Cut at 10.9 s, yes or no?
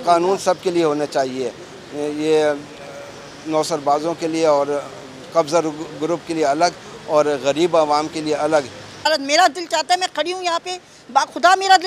no